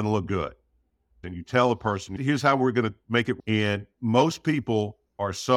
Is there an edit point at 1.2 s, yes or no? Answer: yes